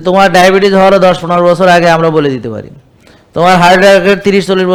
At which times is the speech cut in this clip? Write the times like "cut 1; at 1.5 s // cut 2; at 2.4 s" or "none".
none